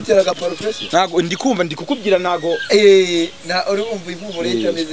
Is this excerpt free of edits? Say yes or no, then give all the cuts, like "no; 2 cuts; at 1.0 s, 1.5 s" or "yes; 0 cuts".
yes; 0 cuts